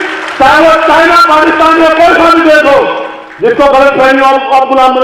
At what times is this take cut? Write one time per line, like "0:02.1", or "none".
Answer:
none